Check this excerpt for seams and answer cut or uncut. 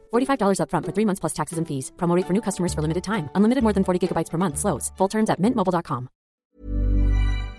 cut